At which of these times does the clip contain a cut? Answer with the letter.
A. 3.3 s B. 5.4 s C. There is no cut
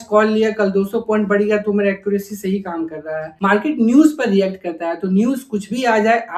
A